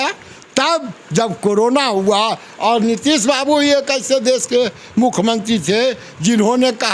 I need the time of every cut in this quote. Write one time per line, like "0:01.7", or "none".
none